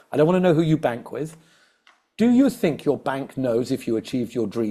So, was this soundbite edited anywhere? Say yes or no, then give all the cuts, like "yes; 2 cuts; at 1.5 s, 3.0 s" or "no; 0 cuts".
no; 0 cuts